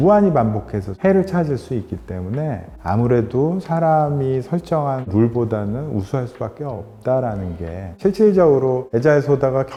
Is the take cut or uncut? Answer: uncut